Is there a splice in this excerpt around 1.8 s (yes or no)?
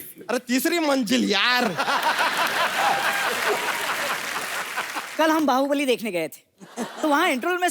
no